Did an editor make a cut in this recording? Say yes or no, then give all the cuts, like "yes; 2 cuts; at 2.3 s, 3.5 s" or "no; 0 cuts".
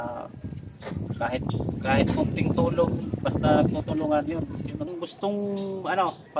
yes; 1 cut; at 4.9 s